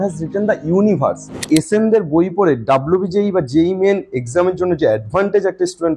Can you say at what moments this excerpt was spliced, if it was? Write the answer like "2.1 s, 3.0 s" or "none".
1.5 s